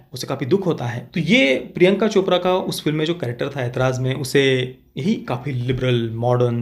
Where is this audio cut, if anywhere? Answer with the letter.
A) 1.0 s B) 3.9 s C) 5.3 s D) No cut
A